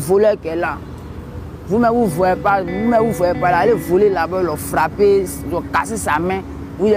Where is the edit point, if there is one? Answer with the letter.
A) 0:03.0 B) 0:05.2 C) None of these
C